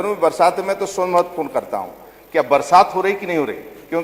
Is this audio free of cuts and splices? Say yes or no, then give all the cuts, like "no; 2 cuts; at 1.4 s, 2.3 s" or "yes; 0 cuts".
yes; 0 cuts